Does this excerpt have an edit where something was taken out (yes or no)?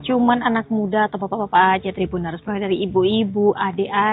yes